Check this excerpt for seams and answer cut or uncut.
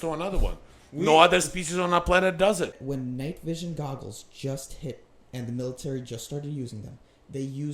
cut